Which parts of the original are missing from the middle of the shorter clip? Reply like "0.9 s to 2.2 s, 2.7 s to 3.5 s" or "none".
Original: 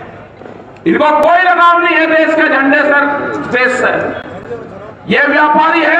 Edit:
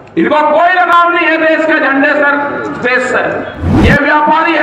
4.3 s to 4.9 s